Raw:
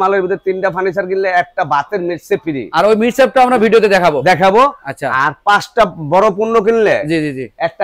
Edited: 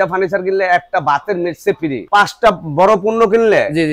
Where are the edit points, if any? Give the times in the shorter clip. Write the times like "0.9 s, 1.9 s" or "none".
2.0 s